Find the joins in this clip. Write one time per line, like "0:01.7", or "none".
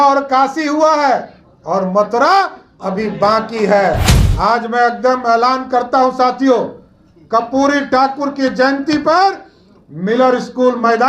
0:04.1